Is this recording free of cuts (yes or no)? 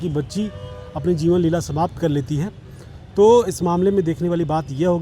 yes